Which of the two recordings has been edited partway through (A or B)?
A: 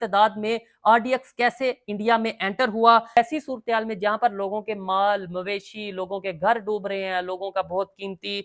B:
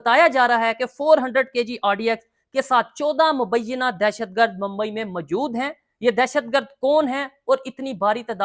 A